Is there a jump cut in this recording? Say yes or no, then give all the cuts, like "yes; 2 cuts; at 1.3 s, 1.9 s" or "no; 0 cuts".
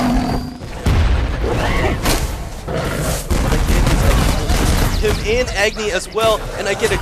no; 0 cuts